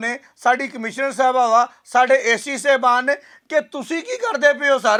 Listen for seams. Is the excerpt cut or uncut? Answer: uncut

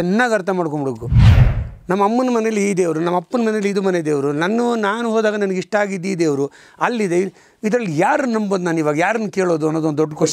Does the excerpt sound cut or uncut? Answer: cut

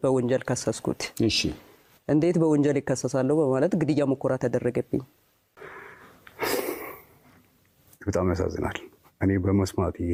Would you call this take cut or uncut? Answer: uncut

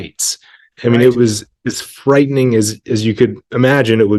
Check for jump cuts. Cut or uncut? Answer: uncut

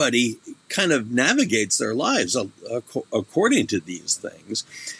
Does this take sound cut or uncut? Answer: uncut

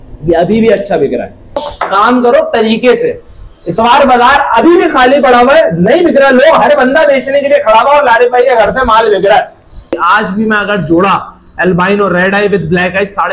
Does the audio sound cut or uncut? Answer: cut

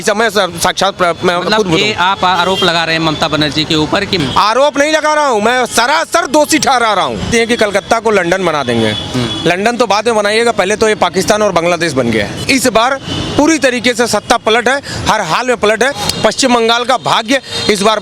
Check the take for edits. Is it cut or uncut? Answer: cut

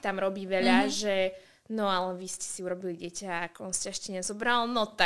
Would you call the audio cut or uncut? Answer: uncut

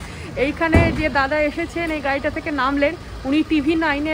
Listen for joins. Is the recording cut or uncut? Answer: uncut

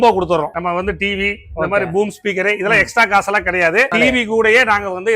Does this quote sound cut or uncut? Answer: cut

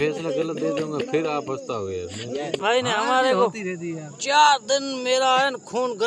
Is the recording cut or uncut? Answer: cut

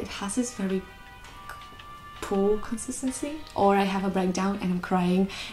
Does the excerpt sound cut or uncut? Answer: cut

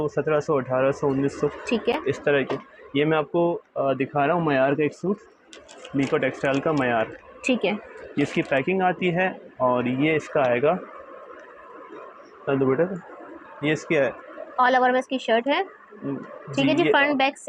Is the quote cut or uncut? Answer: uncut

